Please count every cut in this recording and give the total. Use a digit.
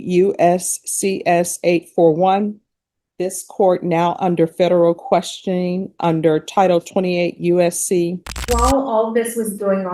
1